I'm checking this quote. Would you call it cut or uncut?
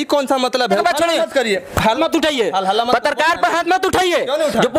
cut